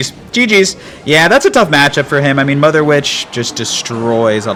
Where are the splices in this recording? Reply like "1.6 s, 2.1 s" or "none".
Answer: none